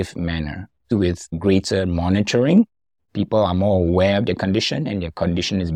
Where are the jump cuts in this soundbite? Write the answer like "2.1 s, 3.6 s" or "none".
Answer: 0.9 s